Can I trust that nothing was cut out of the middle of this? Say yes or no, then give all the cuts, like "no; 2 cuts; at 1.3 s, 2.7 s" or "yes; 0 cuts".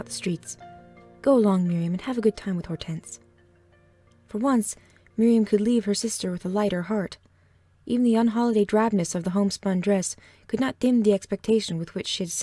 yes; 0 cuts